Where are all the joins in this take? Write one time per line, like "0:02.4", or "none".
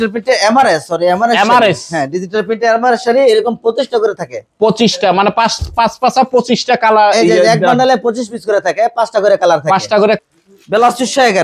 0:10.2